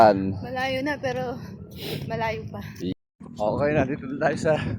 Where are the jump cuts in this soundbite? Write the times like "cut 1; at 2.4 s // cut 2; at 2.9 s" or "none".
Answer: cut 1; at 3.0 s